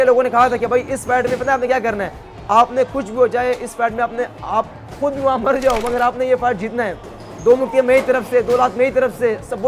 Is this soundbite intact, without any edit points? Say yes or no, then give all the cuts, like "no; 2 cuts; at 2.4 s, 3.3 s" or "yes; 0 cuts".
yes; 0 cuts